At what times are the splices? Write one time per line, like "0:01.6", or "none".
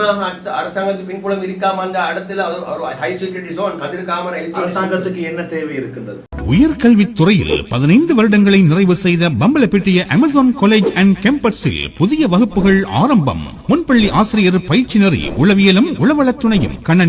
0:06.2